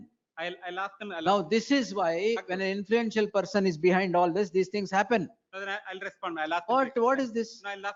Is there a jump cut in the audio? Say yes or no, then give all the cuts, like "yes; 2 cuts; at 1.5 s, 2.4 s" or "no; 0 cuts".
no; 0 cuts